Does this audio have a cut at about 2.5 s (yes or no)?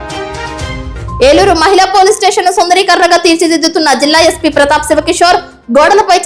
no